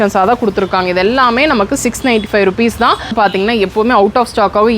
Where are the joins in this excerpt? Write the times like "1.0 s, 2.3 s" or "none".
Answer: 3.1 s